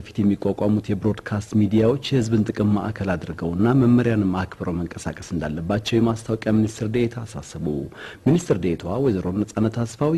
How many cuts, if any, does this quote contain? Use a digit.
0